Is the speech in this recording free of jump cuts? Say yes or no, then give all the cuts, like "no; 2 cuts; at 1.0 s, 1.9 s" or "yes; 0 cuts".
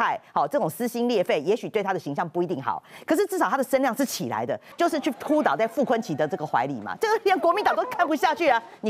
no; 1 cut; at 4.6 s